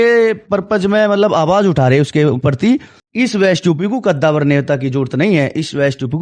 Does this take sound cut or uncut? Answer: cut